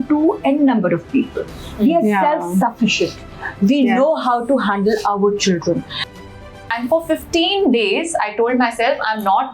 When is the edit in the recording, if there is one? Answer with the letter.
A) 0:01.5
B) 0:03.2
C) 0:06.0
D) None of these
C